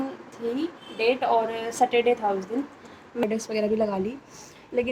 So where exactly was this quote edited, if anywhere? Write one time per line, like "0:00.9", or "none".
0:03.2